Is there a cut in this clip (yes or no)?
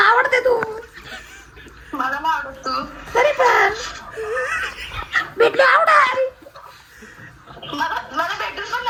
no